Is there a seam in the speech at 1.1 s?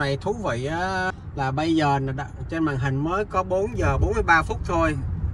yes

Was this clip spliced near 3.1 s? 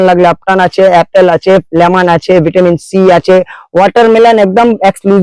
no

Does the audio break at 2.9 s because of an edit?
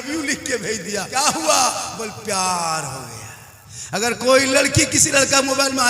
no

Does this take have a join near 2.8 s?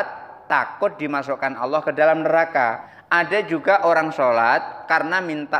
yes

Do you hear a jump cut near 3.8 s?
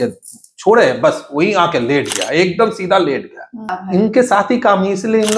yes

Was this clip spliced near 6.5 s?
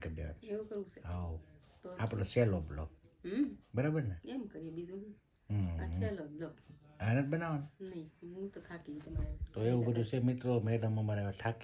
no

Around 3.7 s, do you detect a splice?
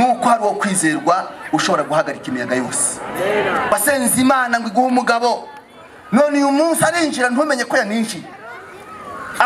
yes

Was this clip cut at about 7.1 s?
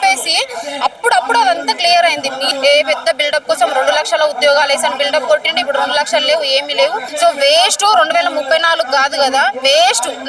yes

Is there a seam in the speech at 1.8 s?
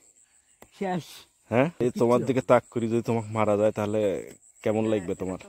yes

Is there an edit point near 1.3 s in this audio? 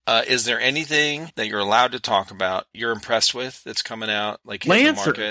yes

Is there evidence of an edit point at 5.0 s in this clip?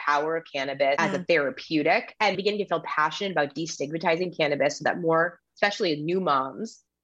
no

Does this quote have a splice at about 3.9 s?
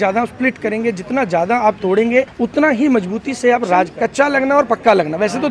yes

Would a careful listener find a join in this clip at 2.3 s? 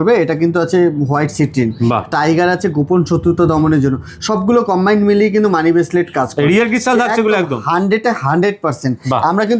no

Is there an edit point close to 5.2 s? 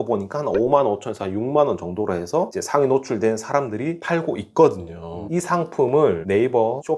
yes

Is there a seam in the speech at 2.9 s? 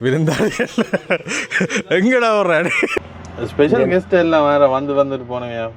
yes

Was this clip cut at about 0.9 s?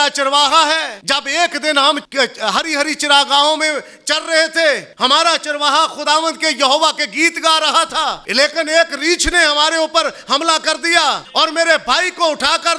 yes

